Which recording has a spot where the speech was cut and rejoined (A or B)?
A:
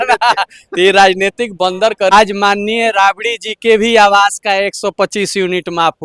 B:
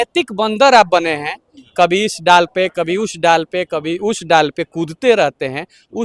A